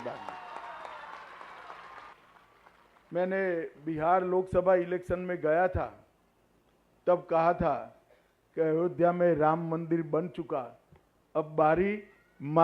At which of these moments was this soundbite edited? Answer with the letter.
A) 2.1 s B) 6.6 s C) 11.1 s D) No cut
A